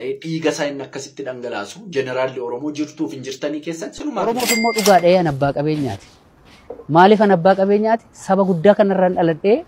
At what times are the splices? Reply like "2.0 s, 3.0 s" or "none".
4.3 s